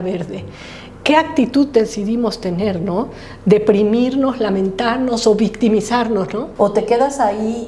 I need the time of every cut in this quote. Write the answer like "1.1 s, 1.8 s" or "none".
6.4 s